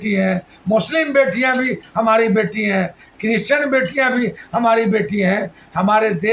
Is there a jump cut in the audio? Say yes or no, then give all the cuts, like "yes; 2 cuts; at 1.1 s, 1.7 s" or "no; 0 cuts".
no; 0 cuts